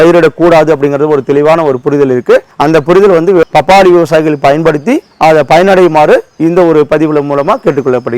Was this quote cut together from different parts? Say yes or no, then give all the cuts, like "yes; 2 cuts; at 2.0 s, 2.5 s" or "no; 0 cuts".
yes; 1 cut; at 3.4 s